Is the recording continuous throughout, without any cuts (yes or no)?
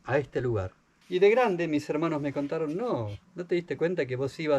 no